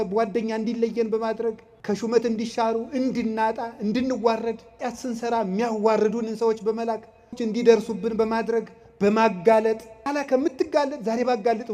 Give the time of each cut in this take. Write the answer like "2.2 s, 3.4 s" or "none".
1.7 s, 4.8 s, 7.4 s, 9.9 s